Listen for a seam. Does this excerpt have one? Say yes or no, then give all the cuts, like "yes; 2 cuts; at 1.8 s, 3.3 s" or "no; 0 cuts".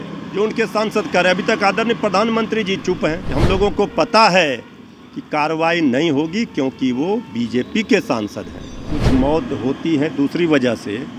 yes; 2 cuts; at 3.3 s, 8.9 s